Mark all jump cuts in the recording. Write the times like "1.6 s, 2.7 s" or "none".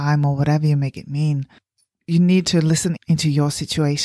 1.8 s